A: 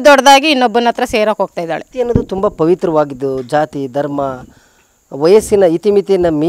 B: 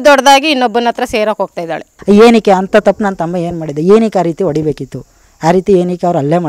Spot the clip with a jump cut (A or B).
B